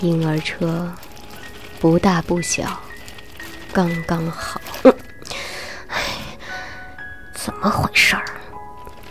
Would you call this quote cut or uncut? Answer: cut